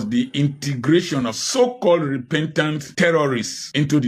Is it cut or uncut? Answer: uncut